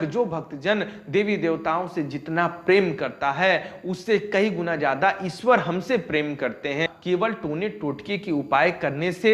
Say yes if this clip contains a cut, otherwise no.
yes